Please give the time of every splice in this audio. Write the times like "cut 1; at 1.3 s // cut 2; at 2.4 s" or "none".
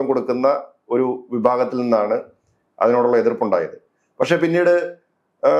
none